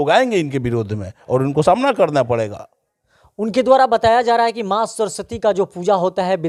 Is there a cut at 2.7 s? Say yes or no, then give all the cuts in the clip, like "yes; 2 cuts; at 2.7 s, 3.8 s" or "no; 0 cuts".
no; 0 cuts